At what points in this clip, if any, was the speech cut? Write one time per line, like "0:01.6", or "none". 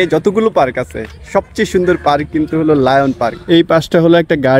0:03.4